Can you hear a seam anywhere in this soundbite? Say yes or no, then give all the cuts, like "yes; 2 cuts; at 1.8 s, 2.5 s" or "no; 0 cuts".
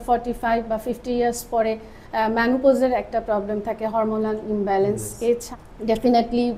yes; 1 cut; at 5.5 s